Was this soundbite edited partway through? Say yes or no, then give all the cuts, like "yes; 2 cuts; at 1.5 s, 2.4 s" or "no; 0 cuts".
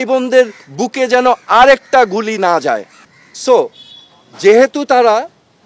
no; 0 cuts